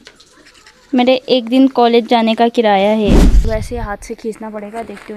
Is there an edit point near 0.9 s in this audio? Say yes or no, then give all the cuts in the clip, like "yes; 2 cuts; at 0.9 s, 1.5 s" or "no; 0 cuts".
no; 1 cut; at 3.3 s